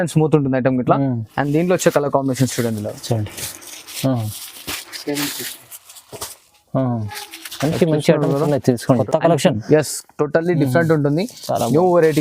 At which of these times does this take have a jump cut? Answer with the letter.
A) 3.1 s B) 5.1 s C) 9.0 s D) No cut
C